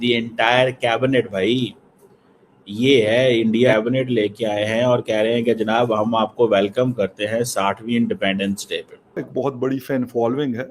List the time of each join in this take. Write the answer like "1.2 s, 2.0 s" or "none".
3.7 s, 9.2 s